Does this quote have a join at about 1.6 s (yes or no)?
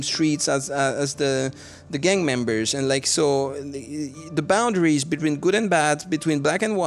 no